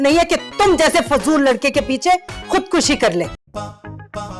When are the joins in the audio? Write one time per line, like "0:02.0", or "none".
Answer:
0:03.4